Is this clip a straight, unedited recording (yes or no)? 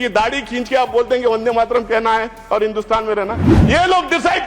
no